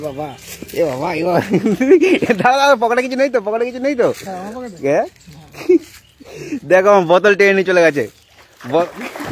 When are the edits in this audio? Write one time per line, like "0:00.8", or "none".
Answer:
none